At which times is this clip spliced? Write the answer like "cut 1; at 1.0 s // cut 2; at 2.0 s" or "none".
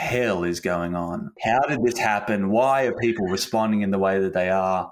cut 1; at 1.4 s